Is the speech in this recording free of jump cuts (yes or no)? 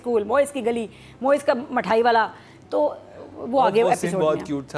yes